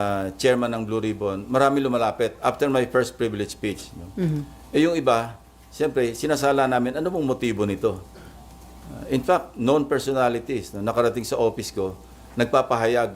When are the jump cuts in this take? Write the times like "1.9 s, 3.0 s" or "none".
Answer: none

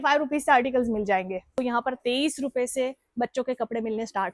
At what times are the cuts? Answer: 1.5 s

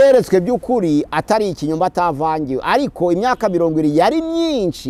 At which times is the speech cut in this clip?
none

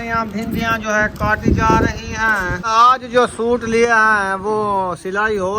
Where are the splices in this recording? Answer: 2.6 s

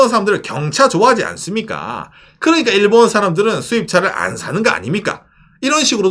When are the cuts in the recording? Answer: none

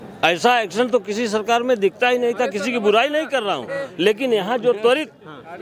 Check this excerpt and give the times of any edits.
none

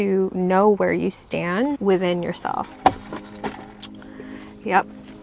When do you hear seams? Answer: none

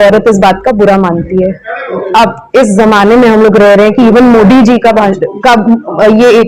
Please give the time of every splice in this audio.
none

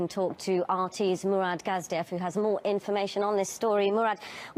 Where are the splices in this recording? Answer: 3.1 s

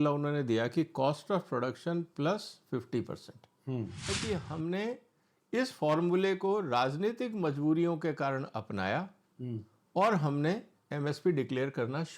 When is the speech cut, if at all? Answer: 4.2 s

